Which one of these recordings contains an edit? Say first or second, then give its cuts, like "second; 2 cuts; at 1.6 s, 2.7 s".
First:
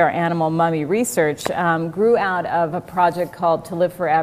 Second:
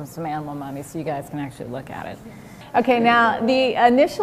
second; 1 cut; at 1.9 s